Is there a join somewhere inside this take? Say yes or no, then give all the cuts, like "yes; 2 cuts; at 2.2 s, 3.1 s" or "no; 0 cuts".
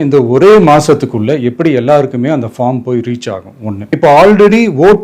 yes; 1 cut; at 3.8 s